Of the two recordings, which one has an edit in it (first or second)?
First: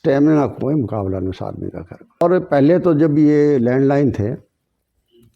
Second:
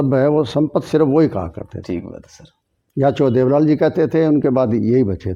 first